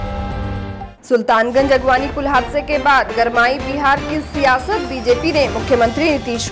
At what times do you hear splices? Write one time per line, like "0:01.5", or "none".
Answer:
0:00.9

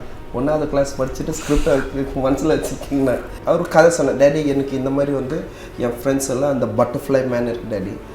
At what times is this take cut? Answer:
0:03.3

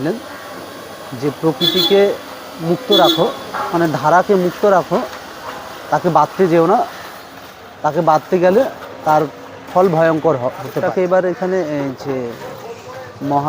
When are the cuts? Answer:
0:10.8

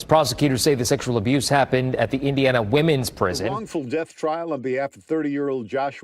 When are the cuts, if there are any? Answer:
0:03.5

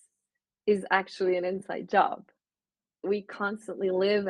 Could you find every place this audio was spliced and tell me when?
0:03.0

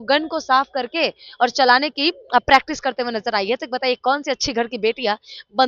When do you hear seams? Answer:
none

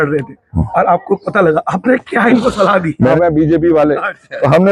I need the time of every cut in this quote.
0:03.1

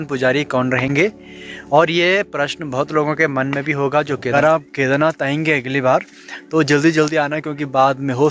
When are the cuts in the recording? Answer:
0:04.3

